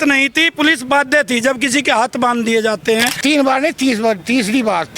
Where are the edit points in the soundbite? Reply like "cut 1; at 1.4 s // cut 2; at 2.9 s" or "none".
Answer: cut 1; at 3.2 s